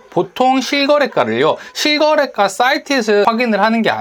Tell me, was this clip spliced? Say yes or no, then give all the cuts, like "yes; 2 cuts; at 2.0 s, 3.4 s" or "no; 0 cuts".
no; 0 cuts